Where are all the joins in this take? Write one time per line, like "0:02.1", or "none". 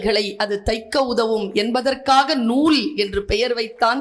none